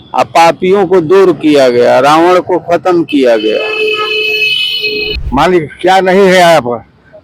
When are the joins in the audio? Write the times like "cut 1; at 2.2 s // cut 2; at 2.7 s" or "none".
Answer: cut 1; at 5.0 s